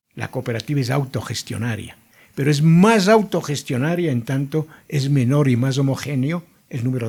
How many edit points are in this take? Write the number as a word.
zero